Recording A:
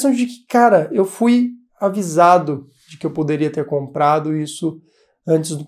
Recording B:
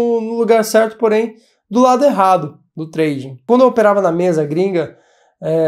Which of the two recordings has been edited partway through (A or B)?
B